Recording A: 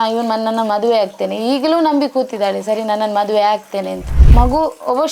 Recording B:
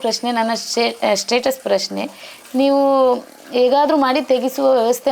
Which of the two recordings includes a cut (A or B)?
A